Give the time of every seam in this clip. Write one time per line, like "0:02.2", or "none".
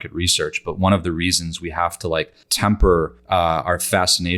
0:02.4
0:03.2